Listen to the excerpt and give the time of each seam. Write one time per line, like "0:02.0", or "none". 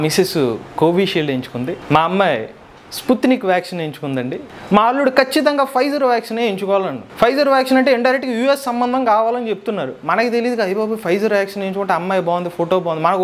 none